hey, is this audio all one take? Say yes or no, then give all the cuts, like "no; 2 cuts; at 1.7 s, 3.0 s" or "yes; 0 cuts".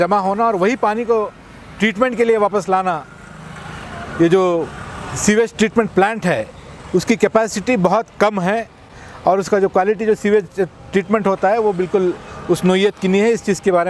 yes; 0 cuts